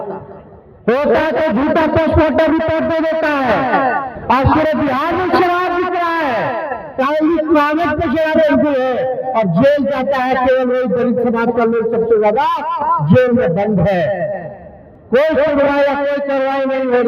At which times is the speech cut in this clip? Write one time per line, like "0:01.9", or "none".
0:04.1